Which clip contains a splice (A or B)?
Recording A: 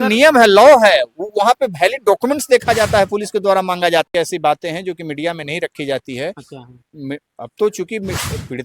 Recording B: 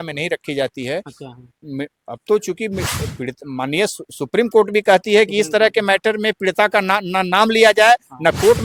A